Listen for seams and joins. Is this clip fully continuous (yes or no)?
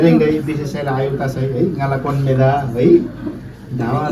yes